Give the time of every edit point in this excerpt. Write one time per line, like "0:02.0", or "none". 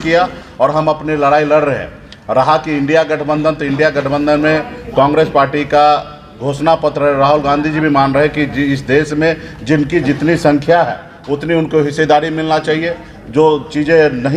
none